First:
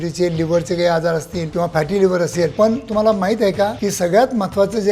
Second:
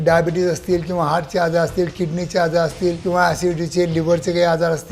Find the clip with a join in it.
first; 1 cut; at 2.5 s

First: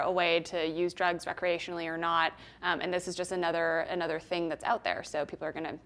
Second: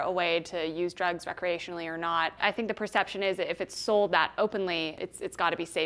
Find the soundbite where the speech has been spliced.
second; 2 cuts; at 2.4 s, 4.9 s

